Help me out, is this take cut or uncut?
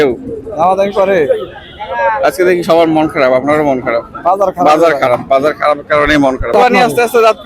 cut